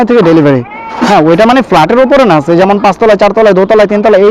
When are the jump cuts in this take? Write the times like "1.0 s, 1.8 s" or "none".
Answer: 1.1 s